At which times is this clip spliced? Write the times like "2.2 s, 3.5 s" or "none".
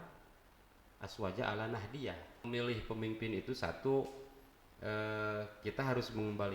2.5 s